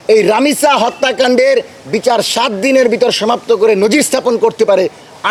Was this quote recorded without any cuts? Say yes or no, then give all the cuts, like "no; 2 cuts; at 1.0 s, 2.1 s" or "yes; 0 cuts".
yes; 0 cuts